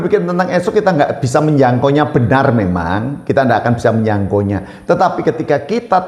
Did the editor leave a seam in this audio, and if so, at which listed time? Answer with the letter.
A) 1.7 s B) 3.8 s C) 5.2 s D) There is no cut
D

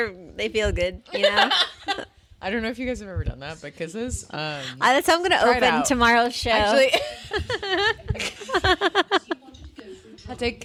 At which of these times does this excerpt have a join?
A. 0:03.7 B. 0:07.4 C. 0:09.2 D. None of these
D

